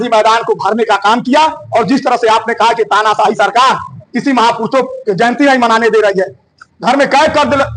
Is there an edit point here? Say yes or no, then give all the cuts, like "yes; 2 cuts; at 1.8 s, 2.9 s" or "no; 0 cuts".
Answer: no; 0 cuts